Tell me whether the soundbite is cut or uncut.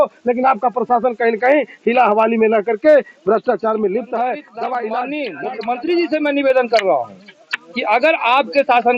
cut